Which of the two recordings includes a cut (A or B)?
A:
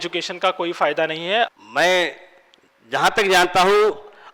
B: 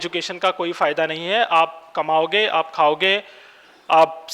A